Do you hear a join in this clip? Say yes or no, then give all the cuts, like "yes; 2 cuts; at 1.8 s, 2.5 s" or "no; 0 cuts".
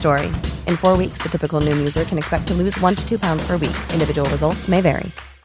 no; 0 cuts